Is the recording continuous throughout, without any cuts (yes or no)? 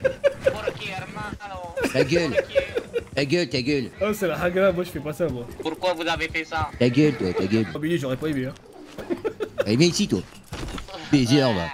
no